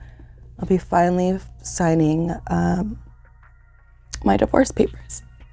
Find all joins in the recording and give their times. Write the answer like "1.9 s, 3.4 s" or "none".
none